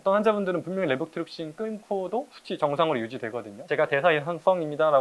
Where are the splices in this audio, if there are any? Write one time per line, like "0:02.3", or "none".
0:03.7